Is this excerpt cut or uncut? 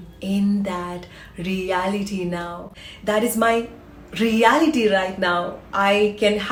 uncut